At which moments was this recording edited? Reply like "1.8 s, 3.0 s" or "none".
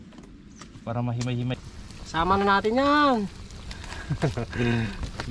1.6 s